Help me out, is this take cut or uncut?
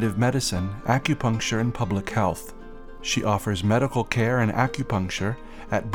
uncut